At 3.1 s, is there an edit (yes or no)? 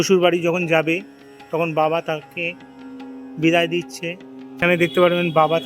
no